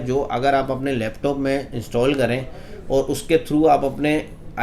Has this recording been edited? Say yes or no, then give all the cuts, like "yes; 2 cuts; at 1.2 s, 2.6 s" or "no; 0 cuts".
no; 0 cuts